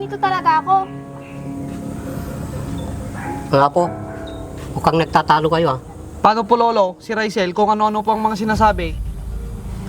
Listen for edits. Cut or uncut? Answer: uncut